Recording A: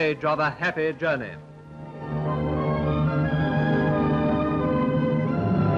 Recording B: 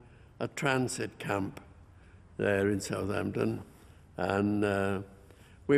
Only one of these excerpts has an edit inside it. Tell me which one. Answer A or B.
A